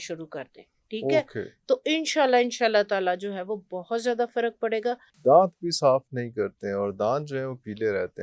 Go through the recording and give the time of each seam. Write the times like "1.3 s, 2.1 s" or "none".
5.1 s